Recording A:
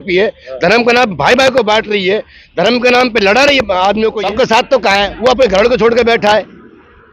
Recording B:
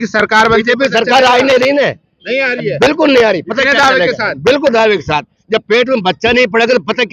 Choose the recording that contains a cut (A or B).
A